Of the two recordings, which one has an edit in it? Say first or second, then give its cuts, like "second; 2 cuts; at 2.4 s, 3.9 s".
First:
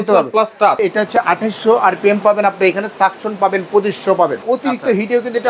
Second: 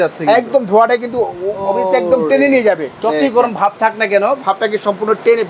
first; 2 cuts; at 0.8 s, 4.4 s